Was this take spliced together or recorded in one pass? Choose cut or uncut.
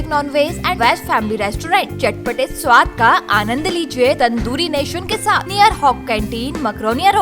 cut